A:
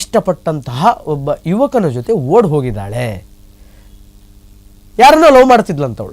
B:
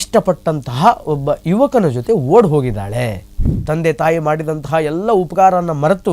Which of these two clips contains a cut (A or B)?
B